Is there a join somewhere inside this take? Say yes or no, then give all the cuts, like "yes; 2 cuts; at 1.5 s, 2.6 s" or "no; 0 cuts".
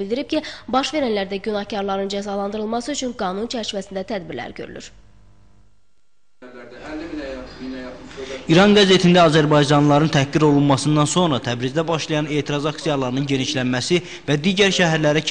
no; 0 cuts